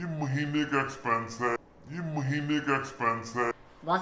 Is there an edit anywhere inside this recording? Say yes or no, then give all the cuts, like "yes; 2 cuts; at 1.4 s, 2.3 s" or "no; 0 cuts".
no; 0 cuts